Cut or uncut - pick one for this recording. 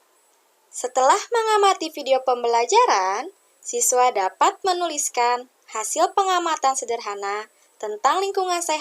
uncut